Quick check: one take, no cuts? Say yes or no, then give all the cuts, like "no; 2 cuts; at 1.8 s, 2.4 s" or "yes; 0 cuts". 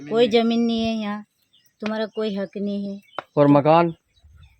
yes; 0 cuts